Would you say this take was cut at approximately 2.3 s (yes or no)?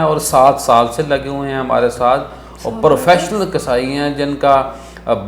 no